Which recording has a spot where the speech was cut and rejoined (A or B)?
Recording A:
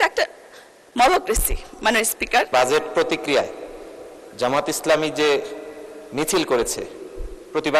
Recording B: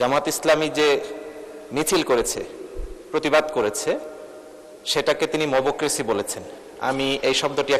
A